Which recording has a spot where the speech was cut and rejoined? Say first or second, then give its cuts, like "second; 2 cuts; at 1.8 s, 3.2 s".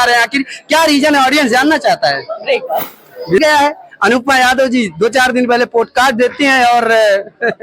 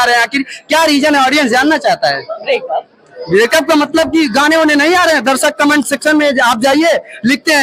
first; 1 cut; at 3.4 s